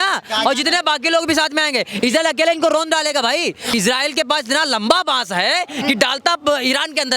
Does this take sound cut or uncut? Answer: cut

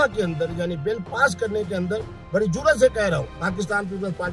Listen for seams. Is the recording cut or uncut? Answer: cut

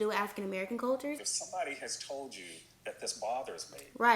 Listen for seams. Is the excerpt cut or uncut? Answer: cut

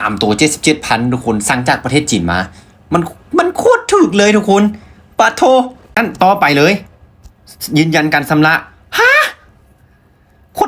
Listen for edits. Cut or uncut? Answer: cut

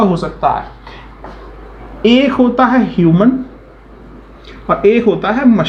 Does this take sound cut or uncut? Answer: uncut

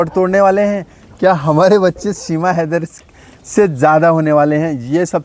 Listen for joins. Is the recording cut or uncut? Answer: uncut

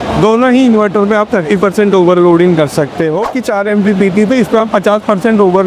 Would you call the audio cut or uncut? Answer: cut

